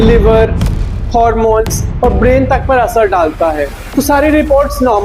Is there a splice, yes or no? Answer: yes